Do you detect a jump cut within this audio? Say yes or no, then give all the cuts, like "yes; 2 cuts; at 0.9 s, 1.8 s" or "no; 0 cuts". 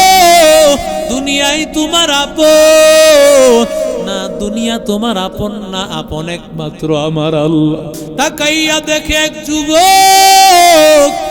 yes; 1 cut; at 8.1 s